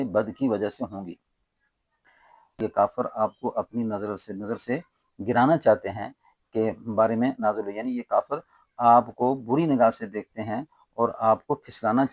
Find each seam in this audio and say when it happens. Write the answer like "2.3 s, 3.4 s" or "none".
2.5 s